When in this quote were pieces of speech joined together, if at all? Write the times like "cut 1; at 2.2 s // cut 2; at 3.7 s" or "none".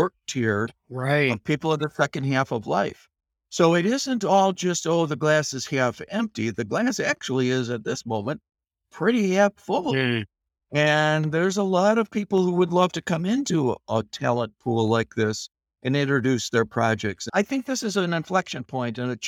cut 1; at 17.2 s

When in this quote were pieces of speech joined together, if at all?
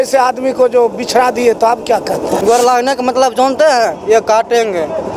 cut 1; at 2.4 s

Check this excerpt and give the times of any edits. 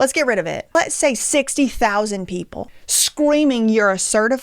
cut 1; at 0.9 s

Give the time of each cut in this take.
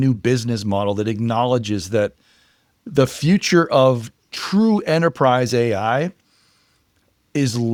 none

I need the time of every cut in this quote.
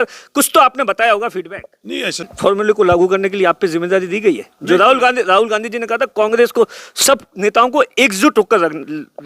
cut 1; at 2.3 s

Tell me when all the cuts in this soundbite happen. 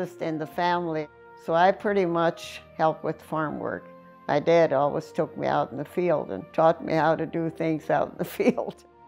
cut 1; at 1.1 s // cut 2; at 2.6 s

